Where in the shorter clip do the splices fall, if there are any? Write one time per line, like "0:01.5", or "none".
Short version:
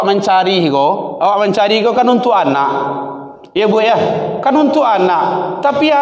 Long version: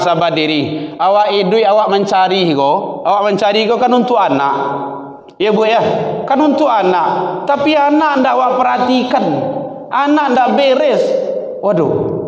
none